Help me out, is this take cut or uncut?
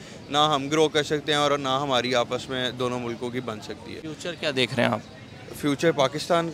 uncut